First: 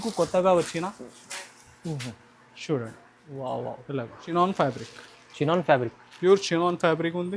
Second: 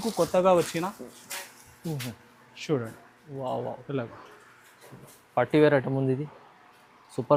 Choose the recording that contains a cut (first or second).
first